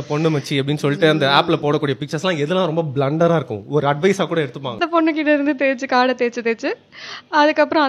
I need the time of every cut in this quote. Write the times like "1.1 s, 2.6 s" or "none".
4.8 s